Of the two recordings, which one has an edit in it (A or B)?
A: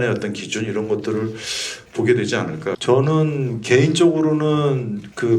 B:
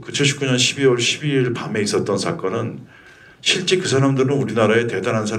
A